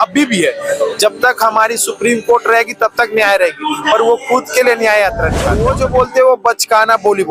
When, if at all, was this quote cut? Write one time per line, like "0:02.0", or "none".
0:05.5